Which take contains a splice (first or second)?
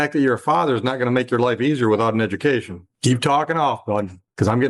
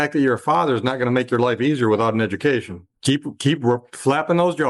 second